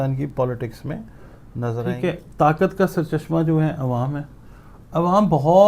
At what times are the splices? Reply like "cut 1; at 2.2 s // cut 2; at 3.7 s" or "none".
cut 1; at 1.8 s